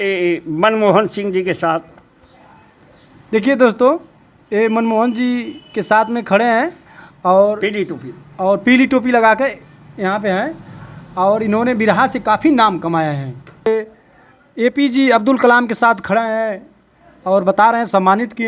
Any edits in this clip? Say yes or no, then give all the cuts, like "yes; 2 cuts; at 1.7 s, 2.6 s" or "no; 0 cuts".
yes; 1 cut; at 13.7 s